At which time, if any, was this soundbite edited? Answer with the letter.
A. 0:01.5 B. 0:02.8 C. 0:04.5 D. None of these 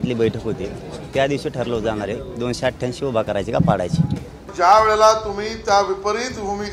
C